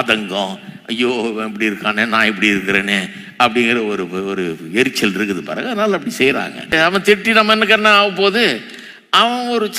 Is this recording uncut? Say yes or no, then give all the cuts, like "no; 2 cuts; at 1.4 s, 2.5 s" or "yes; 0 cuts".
no; 1 cut; at 6.7 s